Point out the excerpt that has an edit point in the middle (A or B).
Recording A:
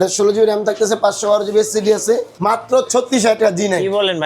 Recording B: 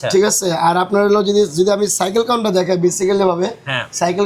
A